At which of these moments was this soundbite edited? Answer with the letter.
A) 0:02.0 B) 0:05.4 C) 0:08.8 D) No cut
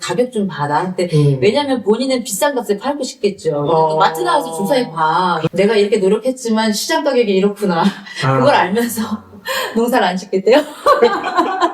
B